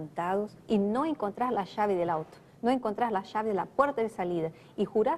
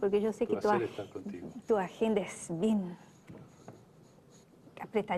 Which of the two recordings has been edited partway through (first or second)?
second